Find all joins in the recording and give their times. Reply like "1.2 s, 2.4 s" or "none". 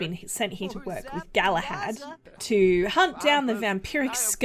2.2 s